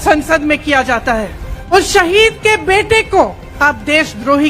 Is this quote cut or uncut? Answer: cut